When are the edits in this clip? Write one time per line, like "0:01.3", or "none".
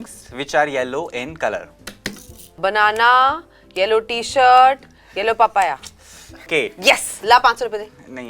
0:02.6
0:06.5